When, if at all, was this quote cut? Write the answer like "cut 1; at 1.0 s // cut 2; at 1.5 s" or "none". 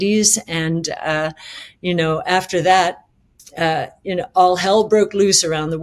none